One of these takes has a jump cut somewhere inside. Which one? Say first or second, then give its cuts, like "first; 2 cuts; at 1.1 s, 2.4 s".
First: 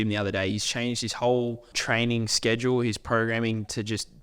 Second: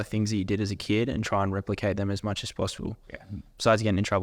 first; 1 cut; at 1.7 s